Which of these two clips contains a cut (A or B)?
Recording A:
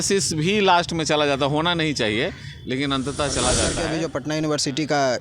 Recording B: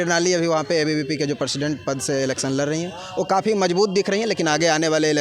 A